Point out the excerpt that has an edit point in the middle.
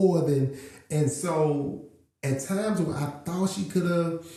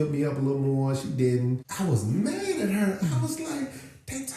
second; 1 cut; at 1.7 s

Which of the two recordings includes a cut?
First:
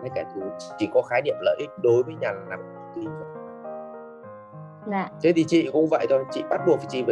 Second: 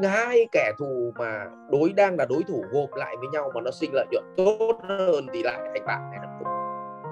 first; 2 cuts; at 3.3 s, 4.6 s

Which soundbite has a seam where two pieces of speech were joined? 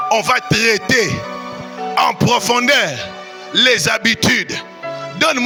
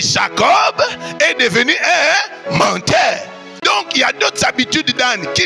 second; 1 cut; at 3.5 s

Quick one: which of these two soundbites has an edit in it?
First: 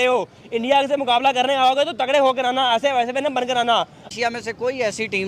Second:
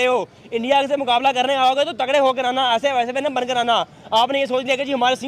first; 1 cut; at 4.1 s

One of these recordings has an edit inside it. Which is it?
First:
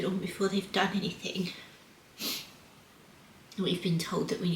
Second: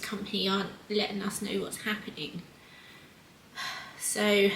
first; 1 cut; at 3.4 s

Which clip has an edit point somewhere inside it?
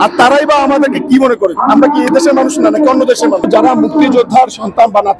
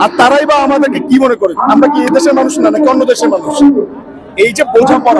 first; 1 cut; at 3.5 s

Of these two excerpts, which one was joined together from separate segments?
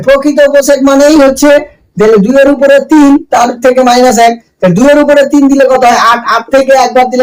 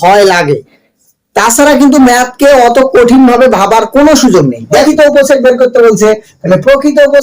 second; 1 cut; at 4.8 s

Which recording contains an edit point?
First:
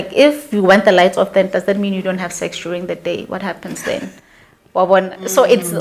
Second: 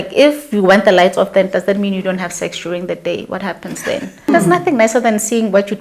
second; 1 cut; at 4.3 s

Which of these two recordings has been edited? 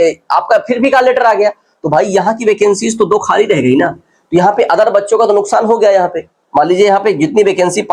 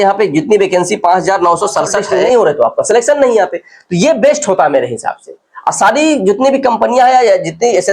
second; 1 cut; at 2.1 s

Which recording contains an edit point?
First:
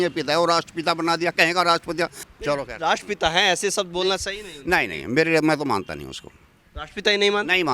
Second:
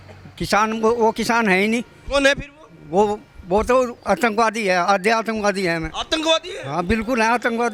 first; 1 cut; at 2.3 s

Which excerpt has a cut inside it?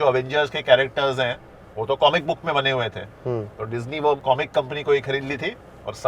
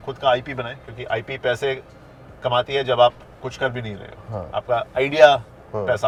first; 1 cut; at 4.2 s

